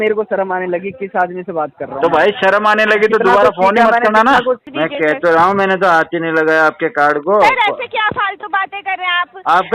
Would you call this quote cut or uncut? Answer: cut